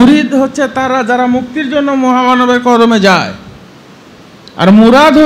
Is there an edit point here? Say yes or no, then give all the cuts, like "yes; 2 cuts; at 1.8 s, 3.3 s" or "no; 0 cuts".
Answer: no; 0 cuts